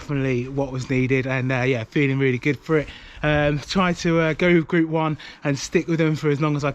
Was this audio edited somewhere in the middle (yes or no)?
no